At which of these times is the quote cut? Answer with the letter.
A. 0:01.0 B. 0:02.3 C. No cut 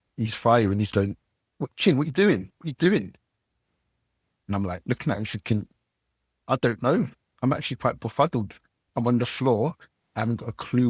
C